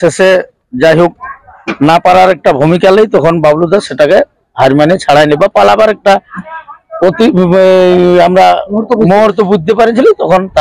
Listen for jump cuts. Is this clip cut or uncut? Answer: uncut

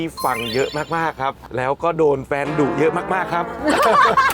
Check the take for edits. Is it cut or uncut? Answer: cut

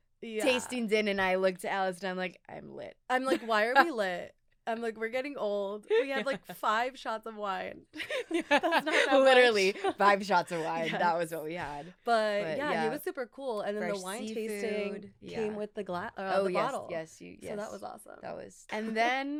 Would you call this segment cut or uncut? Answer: uncut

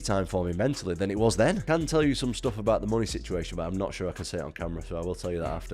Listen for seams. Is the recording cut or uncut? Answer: cut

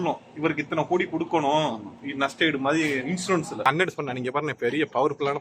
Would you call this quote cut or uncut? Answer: cut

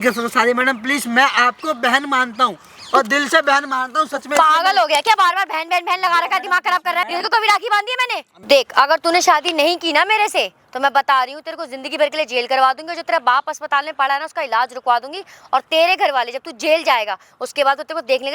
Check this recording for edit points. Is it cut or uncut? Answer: cut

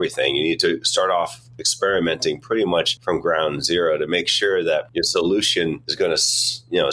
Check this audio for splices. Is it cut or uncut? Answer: cut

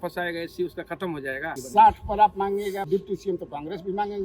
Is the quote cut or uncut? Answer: cut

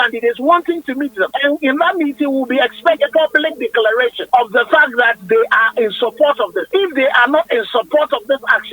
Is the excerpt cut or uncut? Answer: cut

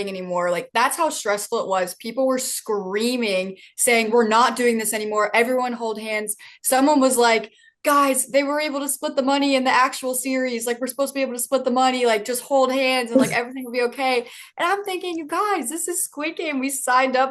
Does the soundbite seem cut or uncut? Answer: uncut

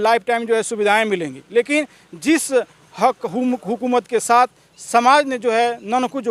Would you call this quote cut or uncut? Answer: uncut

